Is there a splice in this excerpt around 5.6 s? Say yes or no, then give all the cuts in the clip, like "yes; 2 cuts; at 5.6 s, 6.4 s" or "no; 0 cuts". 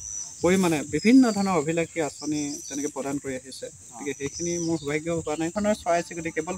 yes; 1 cut; at 5.6 s